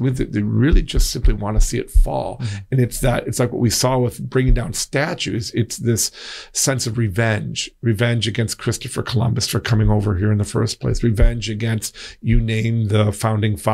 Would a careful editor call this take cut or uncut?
uncut